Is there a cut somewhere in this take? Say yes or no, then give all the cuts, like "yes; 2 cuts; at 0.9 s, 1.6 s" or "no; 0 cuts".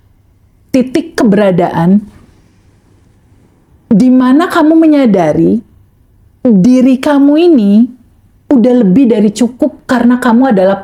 no; 0 cuts